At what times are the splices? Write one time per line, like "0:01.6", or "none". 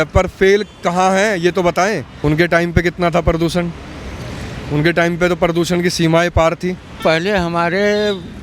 0:02.1
0:06.9